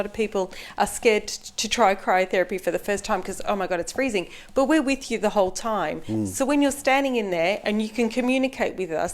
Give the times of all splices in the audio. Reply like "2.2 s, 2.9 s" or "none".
none